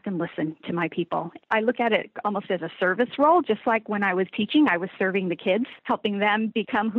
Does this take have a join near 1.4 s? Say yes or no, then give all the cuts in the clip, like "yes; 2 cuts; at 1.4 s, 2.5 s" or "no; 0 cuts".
yes; 2 cuts; at 1.4 s, 5.8 s